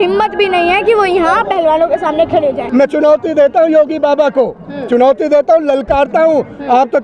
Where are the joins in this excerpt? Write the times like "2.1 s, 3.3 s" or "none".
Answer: 2.6 s